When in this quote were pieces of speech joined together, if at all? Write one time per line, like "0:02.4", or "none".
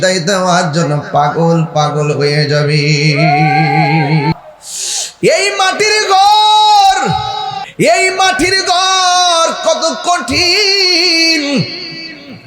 0:04.4
0:07.3